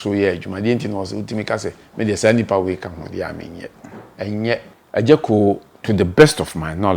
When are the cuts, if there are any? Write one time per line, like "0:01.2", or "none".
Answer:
0:04.7